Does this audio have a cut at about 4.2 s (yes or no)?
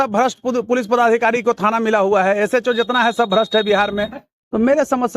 yes